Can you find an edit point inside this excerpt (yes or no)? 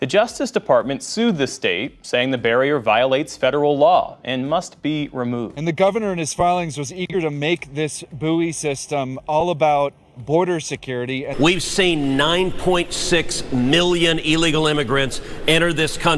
yes